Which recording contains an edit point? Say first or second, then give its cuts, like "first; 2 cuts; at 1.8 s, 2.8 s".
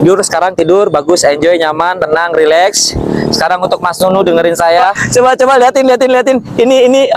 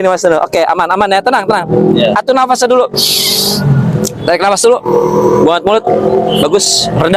first; 1 cut; at 5.0 s